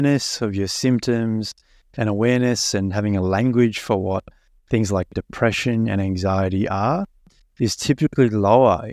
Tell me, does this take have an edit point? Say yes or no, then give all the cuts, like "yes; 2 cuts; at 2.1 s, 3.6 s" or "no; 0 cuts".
no; 0 cuts